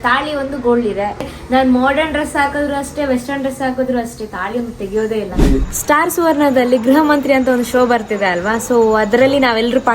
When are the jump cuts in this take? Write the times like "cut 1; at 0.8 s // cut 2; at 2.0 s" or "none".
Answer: cut 1; at 1.4 s // cut 2; at 5.4 s